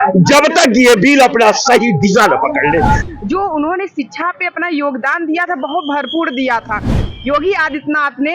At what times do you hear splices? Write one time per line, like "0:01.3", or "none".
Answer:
0:03.0
0:07.1